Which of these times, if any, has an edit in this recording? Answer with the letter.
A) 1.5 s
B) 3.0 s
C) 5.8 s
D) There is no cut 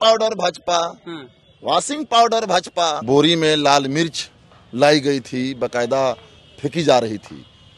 B